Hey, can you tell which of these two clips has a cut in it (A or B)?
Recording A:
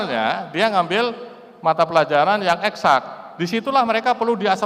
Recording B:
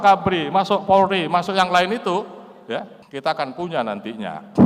B